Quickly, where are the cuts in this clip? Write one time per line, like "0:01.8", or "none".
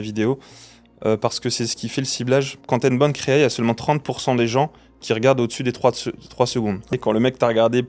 0:02.6
0:06.9